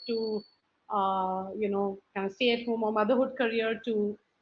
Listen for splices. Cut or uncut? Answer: uncut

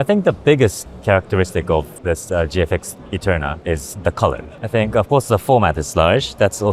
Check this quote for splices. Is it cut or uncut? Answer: cut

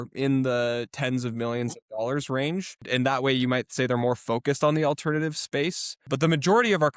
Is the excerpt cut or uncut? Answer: cut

